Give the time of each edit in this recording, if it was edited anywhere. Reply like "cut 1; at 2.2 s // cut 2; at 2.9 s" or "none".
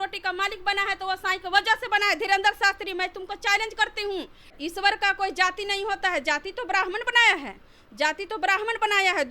cut 1; at 4.5 s